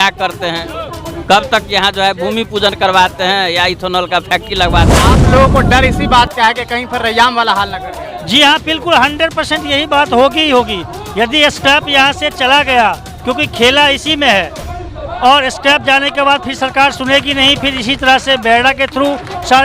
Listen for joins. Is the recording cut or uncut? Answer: cut